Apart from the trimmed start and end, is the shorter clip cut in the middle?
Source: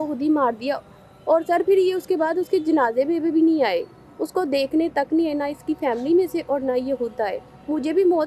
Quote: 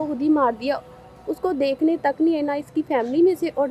yes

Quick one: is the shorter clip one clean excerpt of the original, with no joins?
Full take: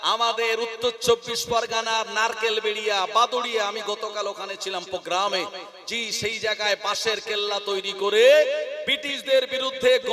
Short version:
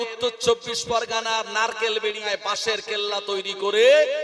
no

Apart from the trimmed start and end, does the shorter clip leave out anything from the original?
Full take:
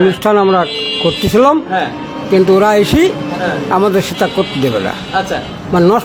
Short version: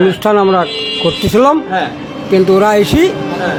no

